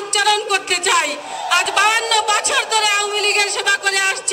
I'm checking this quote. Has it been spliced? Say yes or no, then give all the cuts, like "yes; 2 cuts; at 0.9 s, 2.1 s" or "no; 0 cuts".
yes; 1 cut; at 1.3 s